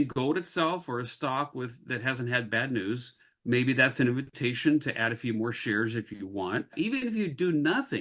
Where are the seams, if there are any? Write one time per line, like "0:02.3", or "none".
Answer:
0:06.7